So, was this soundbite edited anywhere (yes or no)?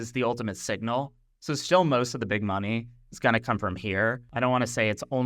yes